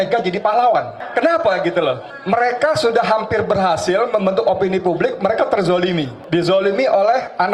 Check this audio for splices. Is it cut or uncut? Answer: cut